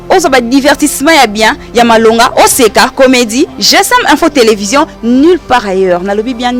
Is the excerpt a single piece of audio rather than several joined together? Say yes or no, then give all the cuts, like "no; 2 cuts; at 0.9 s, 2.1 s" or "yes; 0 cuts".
yes; 0 cuts